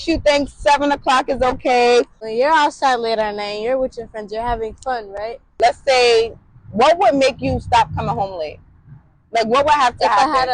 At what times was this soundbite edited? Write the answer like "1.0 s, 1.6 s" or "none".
2.2 s, 5.5 s